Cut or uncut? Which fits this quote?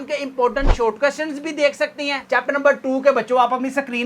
cut